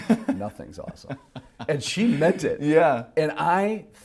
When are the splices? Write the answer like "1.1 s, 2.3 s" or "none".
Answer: none